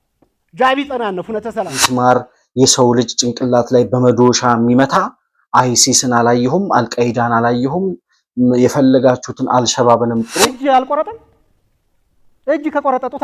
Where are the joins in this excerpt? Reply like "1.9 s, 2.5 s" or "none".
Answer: 1.9 s, 10.5 s